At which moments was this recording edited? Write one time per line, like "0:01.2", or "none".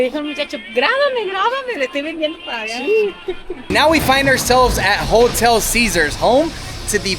0:03.7